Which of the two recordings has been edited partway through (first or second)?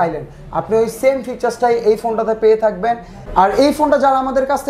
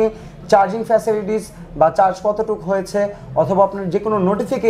first